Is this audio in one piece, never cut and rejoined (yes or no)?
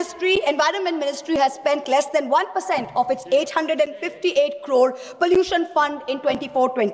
yes